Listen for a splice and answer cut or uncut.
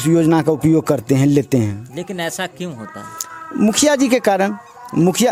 uncut